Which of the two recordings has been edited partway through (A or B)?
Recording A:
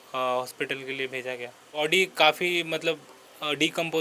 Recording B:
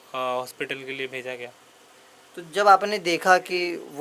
A